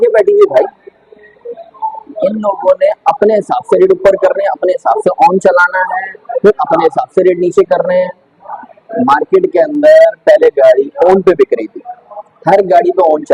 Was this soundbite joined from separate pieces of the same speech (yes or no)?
no